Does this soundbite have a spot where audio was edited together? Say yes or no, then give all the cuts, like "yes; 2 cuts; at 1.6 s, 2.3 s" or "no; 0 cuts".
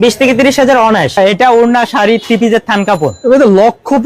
yes; 1 cut; at 1.2 s